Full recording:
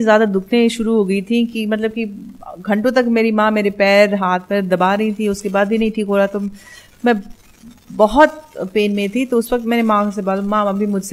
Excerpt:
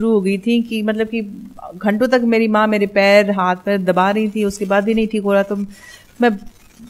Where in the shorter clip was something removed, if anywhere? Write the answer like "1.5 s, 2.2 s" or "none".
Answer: none